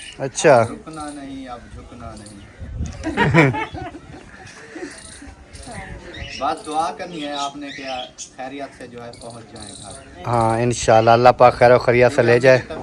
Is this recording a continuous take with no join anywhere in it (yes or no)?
yes